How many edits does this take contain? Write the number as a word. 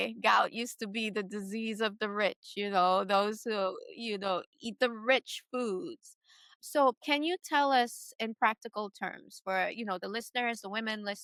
zero